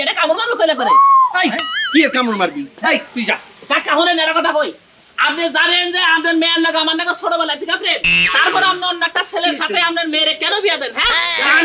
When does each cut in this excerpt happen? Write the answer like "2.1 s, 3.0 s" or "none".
none